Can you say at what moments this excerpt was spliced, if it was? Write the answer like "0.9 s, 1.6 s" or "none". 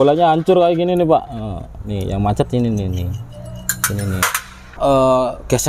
4.7 s